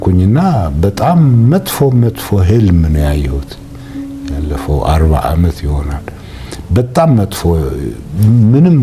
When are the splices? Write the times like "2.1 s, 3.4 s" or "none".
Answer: none